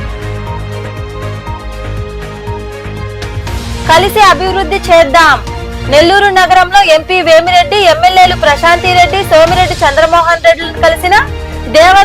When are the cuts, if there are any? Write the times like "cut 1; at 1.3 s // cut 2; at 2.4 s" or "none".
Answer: cut 1; at 3.3 s